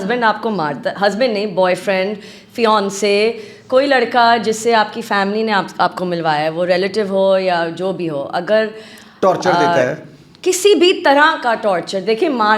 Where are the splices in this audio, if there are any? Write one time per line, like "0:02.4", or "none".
none